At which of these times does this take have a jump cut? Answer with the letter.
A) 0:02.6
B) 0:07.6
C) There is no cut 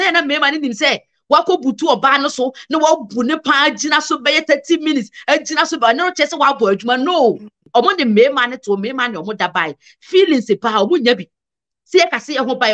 B